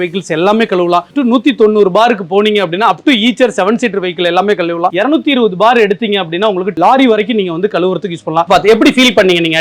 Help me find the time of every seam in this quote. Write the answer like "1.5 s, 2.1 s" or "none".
1.1 s, 8.5 s